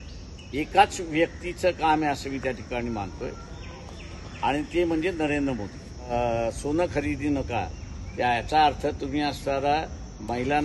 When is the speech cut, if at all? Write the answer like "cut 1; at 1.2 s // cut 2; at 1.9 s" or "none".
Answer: cut 1; at 6.1 s